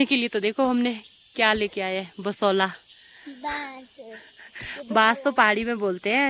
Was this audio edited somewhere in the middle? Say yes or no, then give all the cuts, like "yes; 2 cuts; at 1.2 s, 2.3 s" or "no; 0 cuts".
no; 0 cuts